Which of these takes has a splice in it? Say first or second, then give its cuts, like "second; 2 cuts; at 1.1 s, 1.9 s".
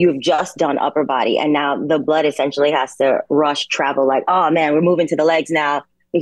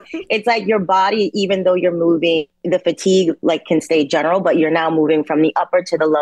second; 1 cut; at 2.5 s